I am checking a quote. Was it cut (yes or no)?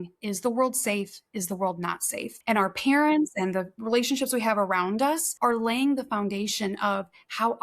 yes